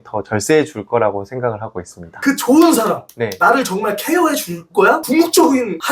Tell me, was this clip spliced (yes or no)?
no